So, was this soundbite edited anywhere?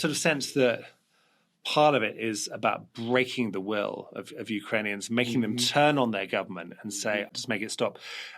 yes; 1 cut; at 7.3 s

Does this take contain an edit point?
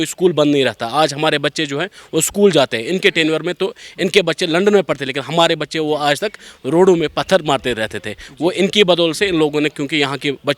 no; 0 cuts

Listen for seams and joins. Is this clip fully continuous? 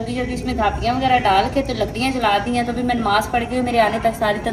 yes; 0 cuts

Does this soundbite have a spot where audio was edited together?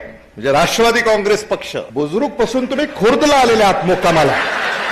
yes; 1 cut; at 1.8 s

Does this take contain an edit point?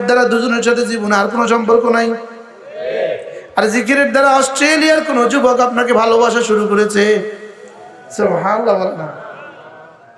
no; 0 cuts

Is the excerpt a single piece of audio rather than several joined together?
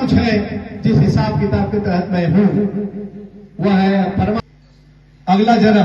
no; 1 cut; at 4.4 s

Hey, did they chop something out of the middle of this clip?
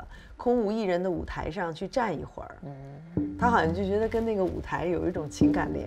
no; 0 cuts

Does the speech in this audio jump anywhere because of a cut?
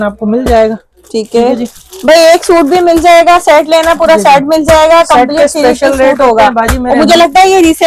no; 0 cuts

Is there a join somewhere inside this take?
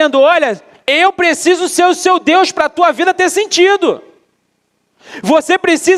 no; 0 cuts

